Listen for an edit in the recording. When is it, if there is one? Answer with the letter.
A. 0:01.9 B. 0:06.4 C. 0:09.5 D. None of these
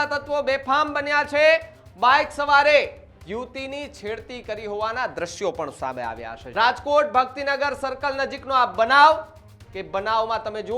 B